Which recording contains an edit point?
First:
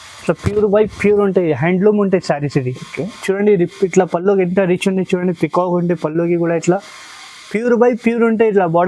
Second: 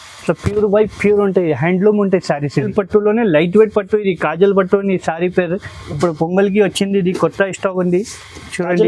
second; 1 cut; at 2.7 s

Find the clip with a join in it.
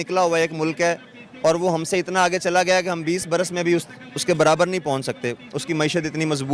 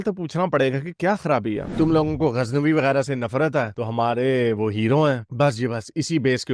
second; 1 cut; at 1.7 s

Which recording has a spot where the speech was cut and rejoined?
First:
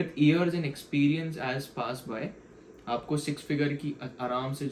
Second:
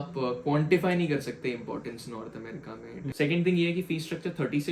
second; 1 cut; at 3.1 s

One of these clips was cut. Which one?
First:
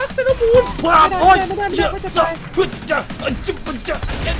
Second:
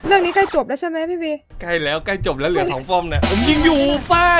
second; 1 cut; at 3.2 s

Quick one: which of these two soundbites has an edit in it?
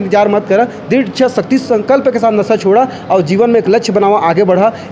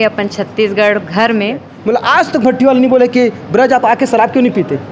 second; 1 cut; at 1.7 s

